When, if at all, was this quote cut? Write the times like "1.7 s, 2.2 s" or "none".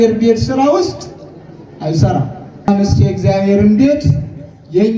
2.7 s